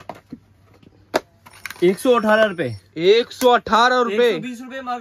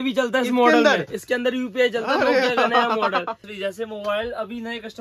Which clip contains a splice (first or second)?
second